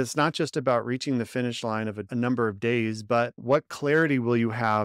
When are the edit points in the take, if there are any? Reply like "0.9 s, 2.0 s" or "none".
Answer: 2.0 s, 3.4 s

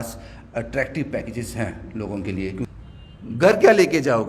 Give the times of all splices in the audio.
2.7 s

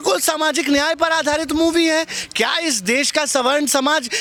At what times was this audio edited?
none

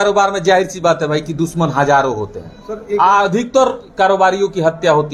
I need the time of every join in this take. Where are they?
none

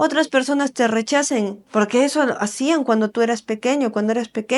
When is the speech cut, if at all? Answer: 1.6 s

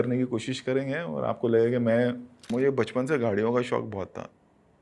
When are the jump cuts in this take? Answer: 2.3 s

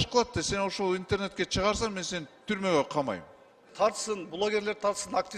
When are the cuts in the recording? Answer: 3.7 s

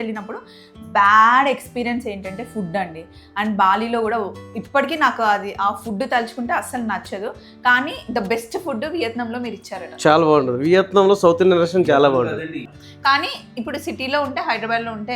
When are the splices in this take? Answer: 12.8 s

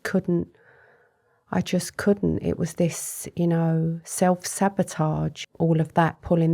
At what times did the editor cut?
5.4 s

